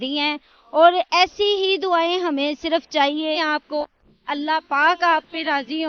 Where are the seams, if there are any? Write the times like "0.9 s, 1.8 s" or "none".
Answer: 3.4 s